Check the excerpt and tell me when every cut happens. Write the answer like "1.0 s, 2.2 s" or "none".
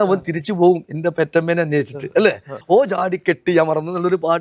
2.5 s

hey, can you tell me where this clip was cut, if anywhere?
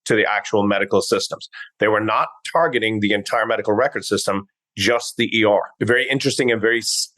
5.7 s

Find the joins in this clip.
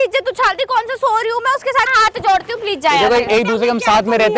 1.9 s

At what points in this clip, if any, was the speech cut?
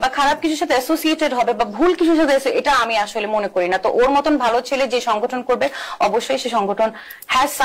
none

